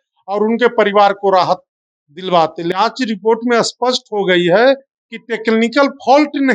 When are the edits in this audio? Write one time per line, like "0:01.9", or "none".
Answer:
0:02.7